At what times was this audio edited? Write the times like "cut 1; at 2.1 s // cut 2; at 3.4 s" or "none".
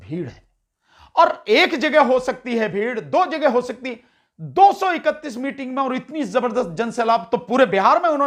none